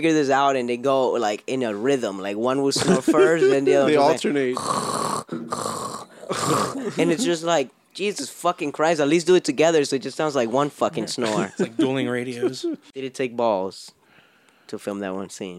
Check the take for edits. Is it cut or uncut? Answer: cut